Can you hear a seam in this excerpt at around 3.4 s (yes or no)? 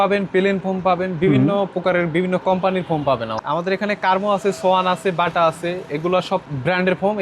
yes